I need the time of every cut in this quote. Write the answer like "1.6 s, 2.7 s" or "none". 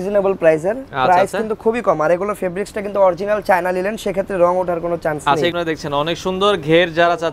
5.5 s